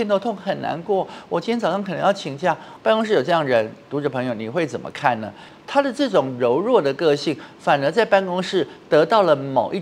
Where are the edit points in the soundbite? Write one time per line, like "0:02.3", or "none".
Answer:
0:02.7
0:05.4